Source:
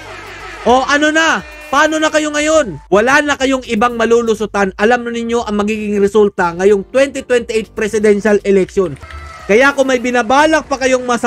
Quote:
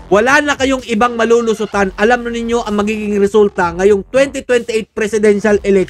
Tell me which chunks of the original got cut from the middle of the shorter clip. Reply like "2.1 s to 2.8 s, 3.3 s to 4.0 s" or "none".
none